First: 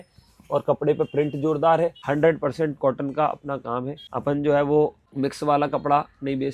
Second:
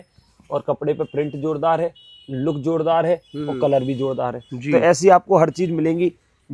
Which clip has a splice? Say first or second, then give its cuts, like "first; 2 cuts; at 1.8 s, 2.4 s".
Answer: first; 3 cuts; at 2.0 s, 4.0 s, 5.0 s